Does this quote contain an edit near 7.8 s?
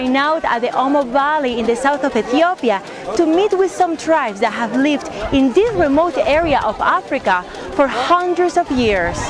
yes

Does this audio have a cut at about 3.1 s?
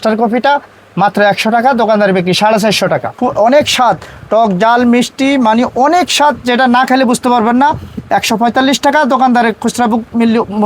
yes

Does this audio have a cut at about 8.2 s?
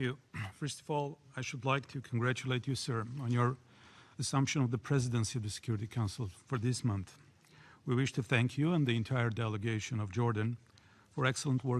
yes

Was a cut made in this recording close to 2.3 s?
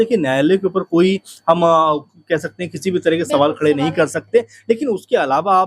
no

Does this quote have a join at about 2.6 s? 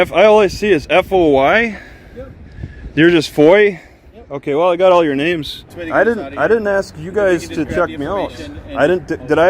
no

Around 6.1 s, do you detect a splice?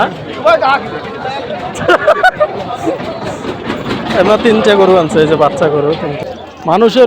yes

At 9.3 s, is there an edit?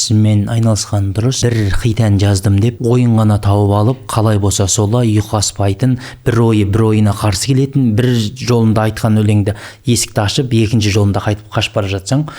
no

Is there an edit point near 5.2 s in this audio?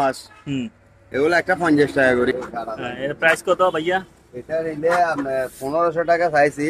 no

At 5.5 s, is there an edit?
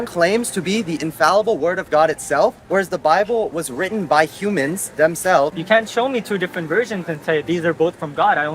yes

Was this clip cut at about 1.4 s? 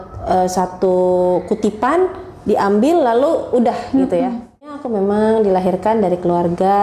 no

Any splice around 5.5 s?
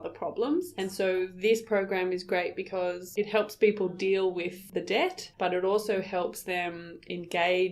no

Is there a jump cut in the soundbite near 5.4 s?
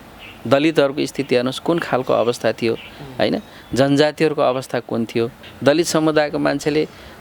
yes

